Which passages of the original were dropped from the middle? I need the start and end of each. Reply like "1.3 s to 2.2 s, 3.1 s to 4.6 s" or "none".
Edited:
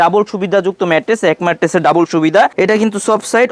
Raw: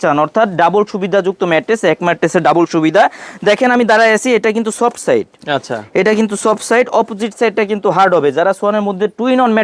3.1 s to 5.9 s